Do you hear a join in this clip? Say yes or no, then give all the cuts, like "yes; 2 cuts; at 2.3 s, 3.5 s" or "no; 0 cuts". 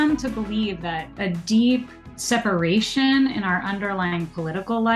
yes; 2 cuts; at 1.2 s, 2.1 s